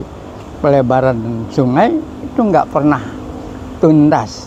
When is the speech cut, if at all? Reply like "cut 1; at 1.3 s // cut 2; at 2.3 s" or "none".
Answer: none